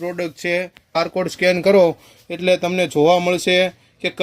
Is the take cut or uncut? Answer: cut